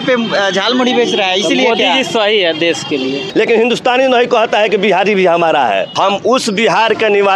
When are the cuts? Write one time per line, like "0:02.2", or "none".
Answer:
0:03.3
0:05.9